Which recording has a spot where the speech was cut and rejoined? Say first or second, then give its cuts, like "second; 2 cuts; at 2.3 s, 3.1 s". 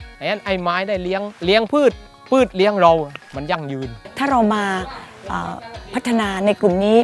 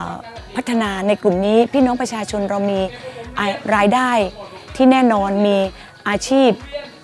first; 2 cuts; at 1.3 s, 3.7 s